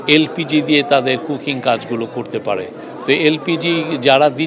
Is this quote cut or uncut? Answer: uncut